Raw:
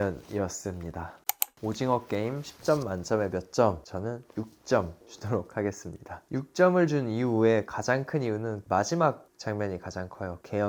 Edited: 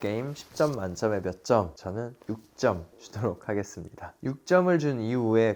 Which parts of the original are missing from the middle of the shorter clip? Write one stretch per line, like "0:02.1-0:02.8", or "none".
none